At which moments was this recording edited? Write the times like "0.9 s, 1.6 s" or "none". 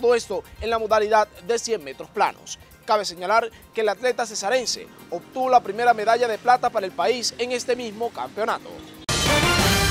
9.0 s